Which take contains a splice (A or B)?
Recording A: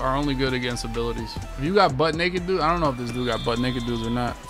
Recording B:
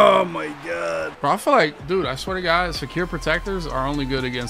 B